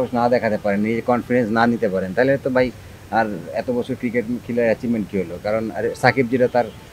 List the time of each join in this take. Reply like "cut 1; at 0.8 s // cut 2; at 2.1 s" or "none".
none